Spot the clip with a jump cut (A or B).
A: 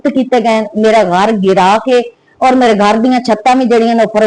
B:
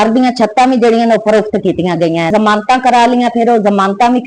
B